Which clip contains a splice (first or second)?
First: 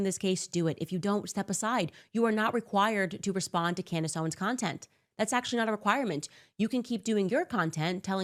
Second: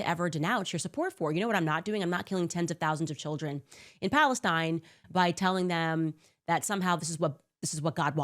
second